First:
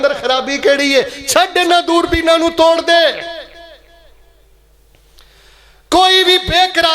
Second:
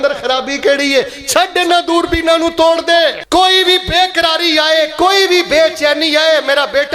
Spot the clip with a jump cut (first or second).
second